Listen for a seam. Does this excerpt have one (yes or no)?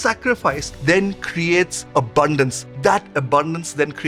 no